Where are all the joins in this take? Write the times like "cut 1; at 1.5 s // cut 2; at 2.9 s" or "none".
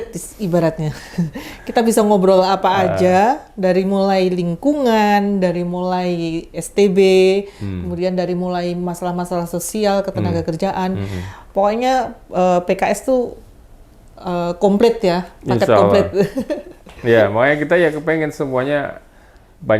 none